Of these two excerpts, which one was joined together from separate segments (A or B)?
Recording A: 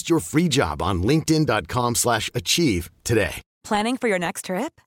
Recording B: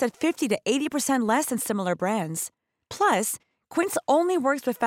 A